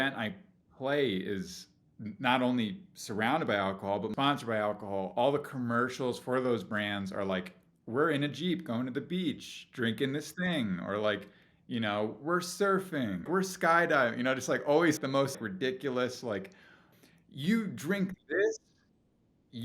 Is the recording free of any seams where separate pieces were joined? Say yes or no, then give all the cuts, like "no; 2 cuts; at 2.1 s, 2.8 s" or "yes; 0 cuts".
no; 4 cuts; at 4.1 s, 13.3 s, 15.2 s, 16.9 s